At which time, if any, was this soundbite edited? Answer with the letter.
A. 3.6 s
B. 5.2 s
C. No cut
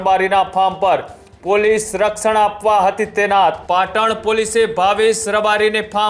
A